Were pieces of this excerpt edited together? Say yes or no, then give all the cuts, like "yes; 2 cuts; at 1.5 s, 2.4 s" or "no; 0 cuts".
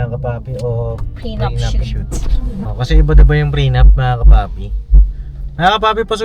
yes; 1 cut; at 2.7 s